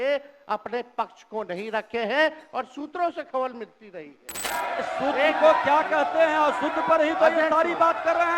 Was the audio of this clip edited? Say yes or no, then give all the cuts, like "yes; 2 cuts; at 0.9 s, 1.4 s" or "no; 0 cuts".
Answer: yes; 1 cut; at 4.4 s